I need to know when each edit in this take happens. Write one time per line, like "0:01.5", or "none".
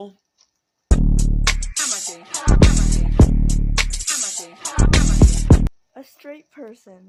none